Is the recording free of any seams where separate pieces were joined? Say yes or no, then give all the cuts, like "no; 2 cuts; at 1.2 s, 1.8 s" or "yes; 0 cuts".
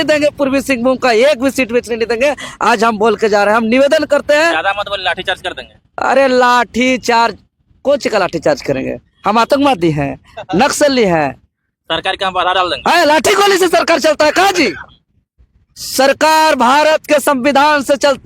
yes; 0 cuts